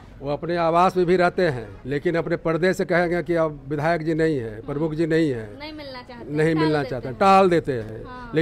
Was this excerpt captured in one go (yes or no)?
no